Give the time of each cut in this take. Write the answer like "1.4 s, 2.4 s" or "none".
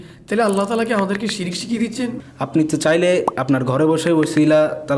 2.2 s